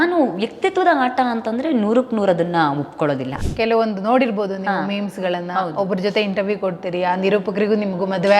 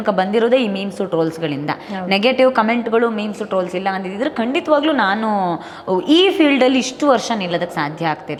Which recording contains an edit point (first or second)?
first